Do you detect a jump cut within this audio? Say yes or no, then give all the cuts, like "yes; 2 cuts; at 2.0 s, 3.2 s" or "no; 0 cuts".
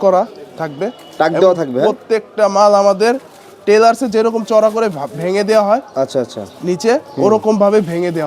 no; 0 cuts